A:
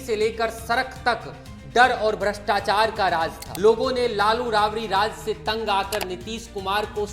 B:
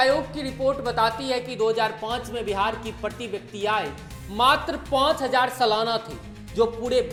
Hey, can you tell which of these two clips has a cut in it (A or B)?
A